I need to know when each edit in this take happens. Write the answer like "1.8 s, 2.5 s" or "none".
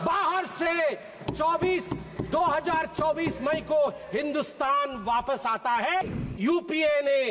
6.0 s